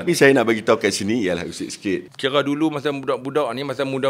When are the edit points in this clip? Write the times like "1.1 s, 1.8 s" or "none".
2.1 s